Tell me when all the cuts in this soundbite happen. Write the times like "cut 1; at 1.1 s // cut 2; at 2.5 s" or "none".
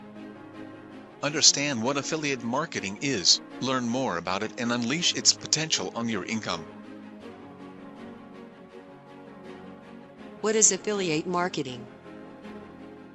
cut 1; at 1.2 s // cut 2; at 6.6 s // cut 3; at 10.4 s // cut 4; at 11.7 s